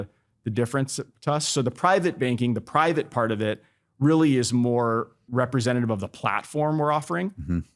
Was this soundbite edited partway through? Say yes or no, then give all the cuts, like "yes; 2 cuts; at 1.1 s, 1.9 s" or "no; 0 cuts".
yes; 1 cut; at 5.2 s